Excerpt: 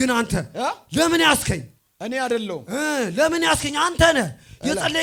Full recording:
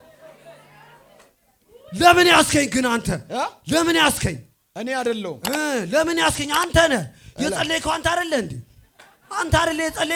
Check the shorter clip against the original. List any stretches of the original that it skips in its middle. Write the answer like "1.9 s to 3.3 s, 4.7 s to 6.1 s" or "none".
none